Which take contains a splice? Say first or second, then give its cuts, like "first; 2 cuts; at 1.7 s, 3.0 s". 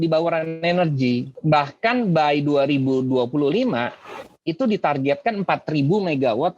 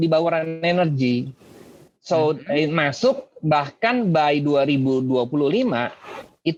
first; 1 cut; at 1.3 s